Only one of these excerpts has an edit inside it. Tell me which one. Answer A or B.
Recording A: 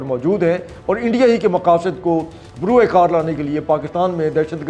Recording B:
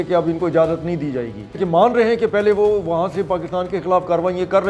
B